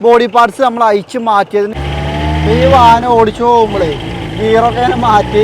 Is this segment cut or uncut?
cut